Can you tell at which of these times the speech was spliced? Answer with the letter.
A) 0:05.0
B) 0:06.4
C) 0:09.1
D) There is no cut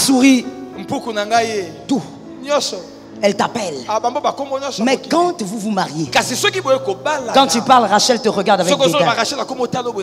D